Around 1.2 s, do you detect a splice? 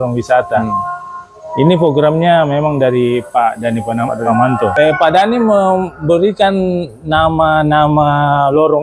no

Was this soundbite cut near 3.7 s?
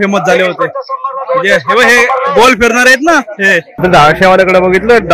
yes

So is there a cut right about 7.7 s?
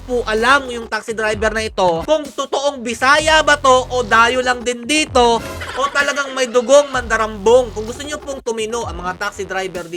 yes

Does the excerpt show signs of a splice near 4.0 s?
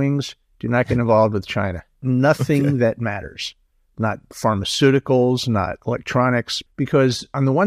no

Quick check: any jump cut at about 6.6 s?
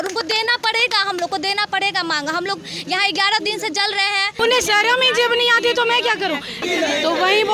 yes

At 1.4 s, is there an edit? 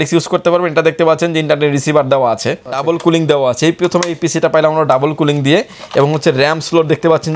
no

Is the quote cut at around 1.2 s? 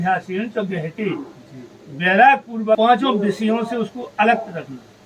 no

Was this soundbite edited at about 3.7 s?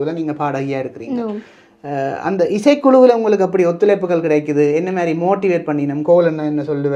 no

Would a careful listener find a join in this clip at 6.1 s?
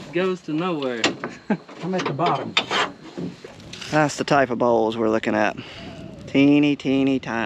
no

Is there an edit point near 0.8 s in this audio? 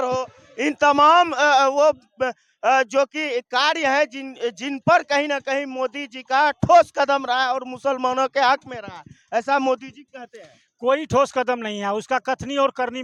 no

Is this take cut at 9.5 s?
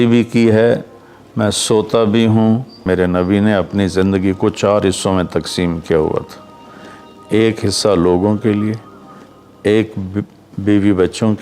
no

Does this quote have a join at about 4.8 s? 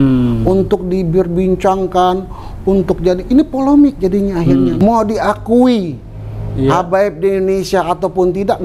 yes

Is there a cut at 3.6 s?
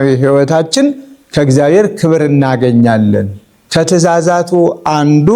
yes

